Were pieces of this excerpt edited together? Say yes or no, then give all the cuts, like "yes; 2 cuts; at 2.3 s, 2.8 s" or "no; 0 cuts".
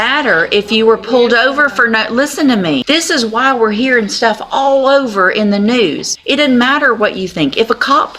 yes; 2 cuts; at 2.8 s, 6.1 s